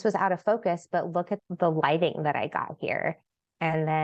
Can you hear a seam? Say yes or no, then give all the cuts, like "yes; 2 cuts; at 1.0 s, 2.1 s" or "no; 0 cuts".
yes; 1 cut; at 1.3 s